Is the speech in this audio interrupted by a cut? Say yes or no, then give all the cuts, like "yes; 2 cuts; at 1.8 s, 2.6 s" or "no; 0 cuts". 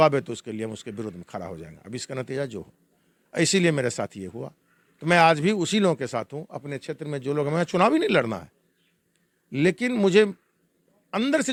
no; 0 cuts